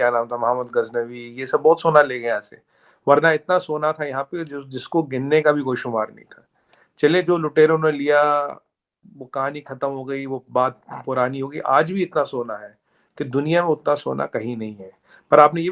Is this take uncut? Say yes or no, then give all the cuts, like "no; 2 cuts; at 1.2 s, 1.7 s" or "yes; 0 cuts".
yes; 0 cuts